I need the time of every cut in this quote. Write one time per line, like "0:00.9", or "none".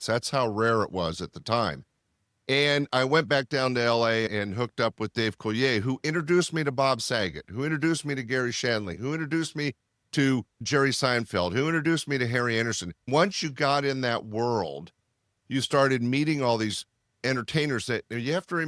none